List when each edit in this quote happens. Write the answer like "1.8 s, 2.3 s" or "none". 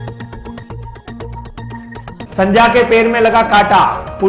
none